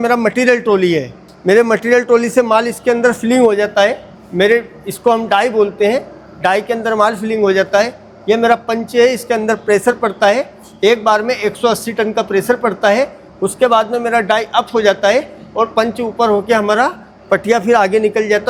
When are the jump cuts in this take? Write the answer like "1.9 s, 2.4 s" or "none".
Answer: none